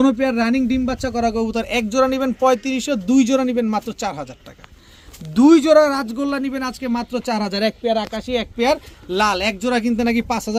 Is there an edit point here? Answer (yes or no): no